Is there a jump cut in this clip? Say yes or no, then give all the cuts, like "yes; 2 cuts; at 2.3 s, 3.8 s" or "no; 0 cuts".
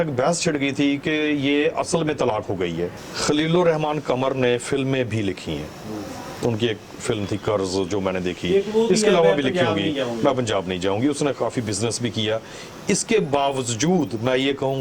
yes; 1 cut; at 3.1 s